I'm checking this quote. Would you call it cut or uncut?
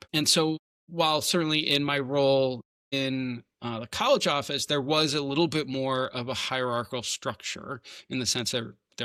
uncut